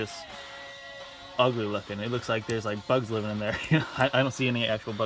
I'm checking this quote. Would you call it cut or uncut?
uncut